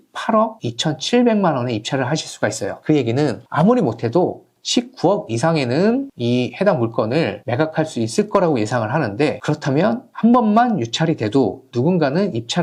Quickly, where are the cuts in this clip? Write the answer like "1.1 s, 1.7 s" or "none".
none